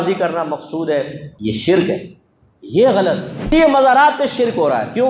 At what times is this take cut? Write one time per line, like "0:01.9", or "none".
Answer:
0:01.2
0:03.3